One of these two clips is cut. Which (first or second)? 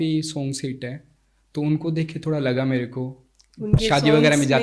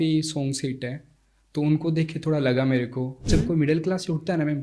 second